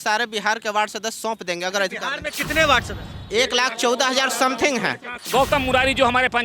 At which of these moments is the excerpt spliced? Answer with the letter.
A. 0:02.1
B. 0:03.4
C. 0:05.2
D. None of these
C